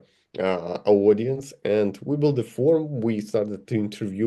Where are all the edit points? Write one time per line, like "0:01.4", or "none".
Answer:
none